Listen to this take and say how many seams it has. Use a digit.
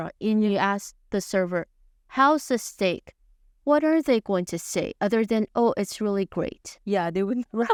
0